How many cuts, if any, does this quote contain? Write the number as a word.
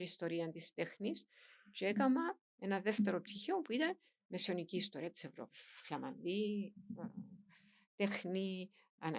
zero